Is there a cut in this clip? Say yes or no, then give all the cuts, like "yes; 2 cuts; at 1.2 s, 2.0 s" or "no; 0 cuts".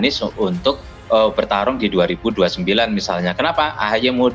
no; 0 cuts